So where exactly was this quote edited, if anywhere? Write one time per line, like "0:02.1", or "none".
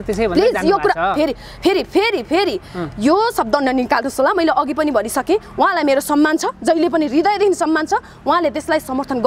none